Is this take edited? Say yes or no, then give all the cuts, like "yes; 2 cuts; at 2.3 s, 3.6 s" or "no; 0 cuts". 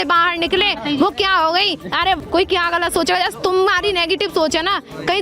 yes; 1 cut; at 2.2 s